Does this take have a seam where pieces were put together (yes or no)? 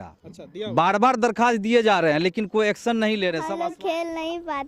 yes